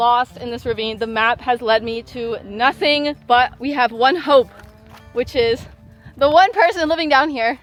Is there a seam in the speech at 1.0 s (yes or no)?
no